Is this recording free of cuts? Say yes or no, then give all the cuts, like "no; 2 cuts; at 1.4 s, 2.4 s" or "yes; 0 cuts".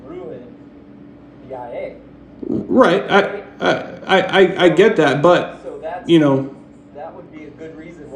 yes; 0 cuts